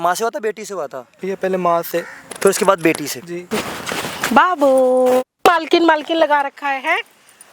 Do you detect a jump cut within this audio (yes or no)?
yes